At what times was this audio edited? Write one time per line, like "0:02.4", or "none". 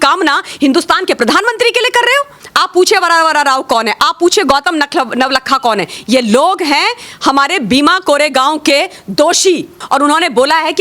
0:02.4
0:09.8